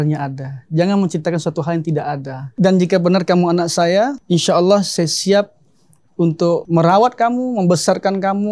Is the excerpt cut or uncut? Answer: cut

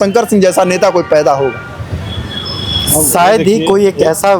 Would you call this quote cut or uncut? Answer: uncut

